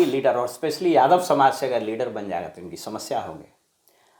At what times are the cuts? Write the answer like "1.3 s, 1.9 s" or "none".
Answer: none